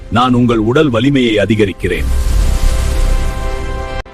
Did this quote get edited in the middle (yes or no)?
no